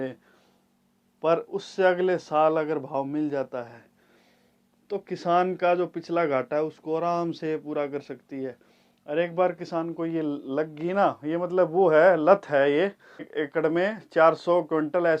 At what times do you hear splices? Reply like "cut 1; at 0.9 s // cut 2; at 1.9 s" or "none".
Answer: cut 1; at 13.0 s